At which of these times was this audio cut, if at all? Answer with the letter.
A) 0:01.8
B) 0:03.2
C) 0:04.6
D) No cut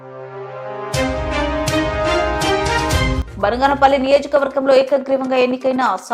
B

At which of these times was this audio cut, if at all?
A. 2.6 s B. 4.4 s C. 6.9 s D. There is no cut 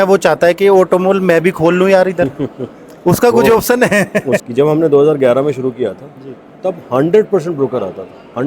B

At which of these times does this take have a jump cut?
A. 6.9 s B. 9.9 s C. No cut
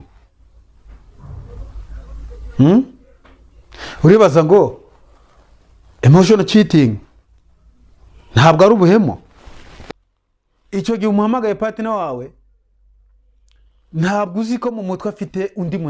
B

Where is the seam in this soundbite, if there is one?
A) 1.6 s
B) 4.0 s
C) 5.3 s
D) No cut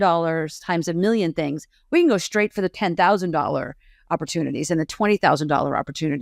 D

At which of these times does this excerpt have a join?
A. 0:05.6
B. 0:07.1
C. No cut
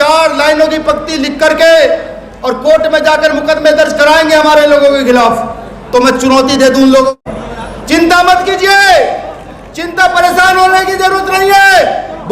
B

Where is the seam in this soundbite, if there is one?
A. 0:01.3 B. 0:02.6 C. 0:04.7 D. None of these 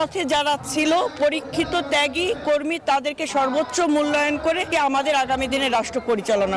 C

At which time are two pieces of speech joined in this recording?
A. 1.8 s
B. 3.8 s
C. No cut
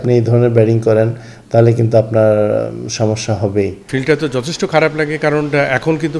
B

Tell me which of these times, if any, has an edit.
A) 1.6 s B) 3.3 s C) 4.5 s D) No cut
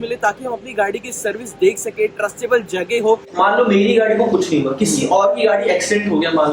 B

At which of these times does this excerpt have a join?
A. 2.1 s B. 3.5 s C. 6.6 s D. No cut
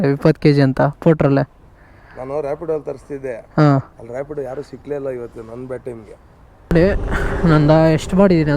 C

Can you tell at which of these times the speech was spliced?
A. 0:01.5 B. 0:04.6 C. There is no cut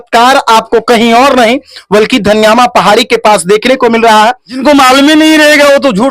B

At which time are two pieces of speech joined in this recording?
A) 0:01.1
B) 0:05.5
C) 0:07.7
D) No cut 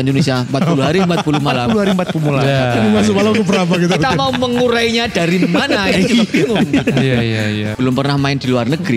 C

